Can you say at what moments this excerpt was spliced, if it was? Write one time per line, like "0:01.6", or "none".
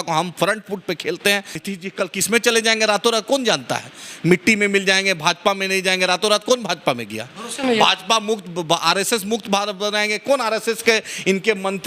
0:01.6

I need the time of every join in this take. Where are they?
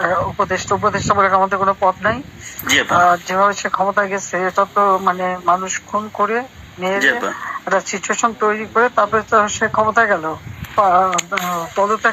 0:10.7

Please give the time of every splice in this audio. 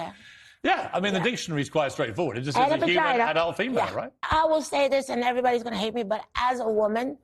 0:04.3

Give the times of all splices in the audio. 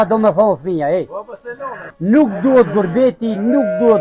0:01.9

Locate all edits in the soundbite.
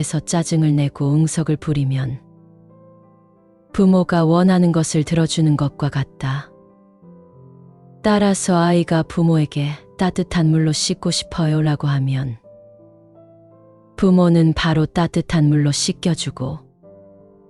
0:02.2
0:03.7

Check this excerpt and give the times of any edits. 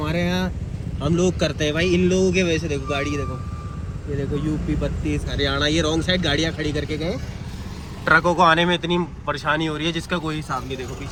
none

